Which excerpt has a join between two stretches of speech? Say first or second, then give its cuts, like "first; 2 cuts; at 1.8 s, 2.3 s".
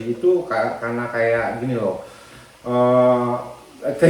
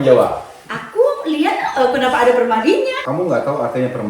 second; 1 cut; at 3.0 s